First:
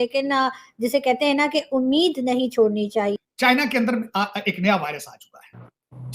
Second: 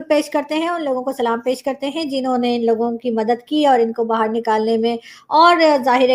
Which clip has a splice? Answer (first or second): first